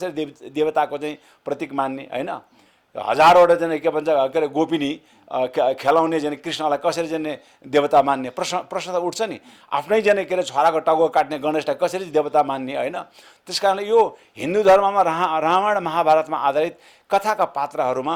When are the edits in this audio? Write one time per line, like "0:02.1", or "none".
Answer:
none

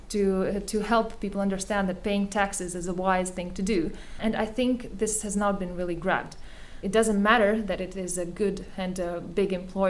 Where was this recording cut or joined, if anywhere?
0:04.2
0:06.8

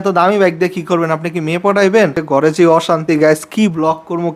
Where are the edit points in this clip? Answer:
0:02.2

